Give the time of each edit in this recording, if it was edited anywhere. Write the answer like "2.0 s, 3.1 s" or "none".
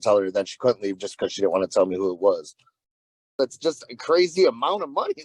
3.3 s